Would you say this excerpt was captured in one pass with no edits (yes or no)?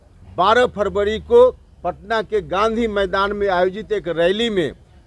yes